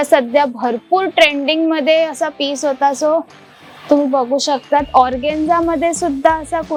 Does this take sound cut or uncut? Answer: uncut